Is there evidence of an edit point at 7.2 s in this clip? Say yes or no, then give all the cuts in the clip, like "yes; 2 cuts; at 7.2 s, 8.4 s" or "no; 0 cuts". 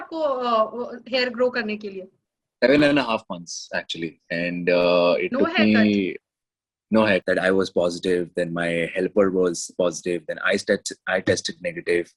yes; 1 cut; at 7.2 s